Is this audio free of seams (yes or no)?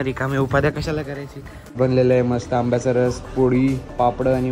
no